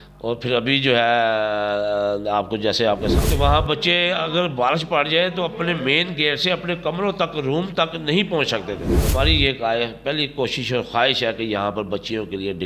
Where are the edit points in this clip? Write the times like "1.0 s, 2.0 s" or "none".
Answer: 3.1 s, 8.9 s